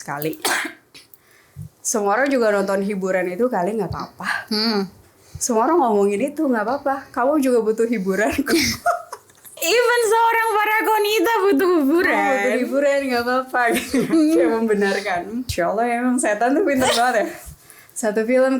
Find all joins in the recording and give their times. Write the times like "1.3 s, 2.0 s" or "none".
9.6 s, 15.4 s